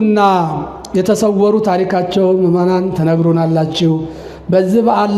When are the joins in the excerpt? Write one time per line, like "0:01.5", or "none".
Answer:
none